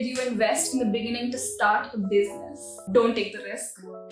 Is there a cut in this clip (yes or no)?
yes